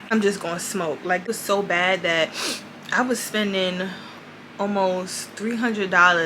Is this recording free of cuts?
no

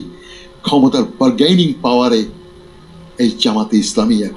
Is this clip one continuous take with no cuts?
yes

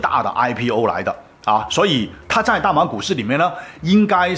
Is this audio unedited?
yes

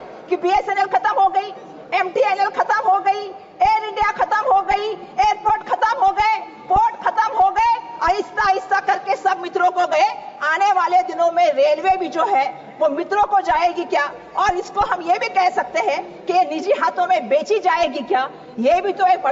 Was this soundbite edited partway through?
no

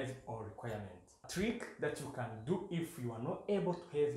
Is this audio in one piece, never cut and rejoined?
no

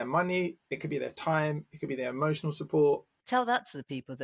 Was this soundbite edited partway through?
yes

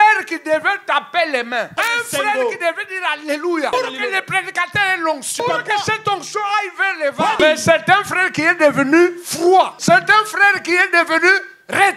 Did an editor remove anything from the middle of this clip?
yes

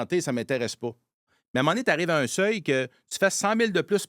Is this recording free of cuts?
no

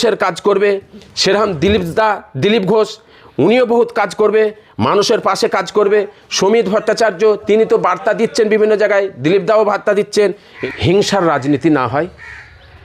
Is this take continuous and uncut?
no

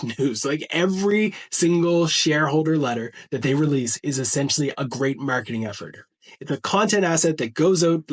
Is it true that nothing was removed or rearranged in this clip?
no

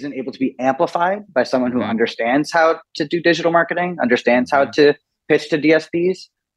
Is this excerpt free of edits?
yes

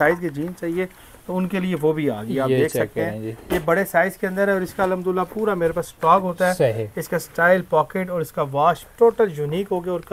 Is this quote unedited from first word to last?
yes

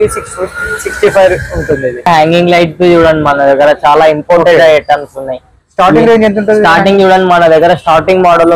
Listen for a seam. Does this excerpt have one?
yes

